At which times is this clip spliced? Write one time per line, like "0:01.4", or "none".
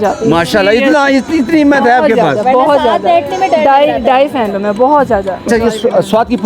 0:05.4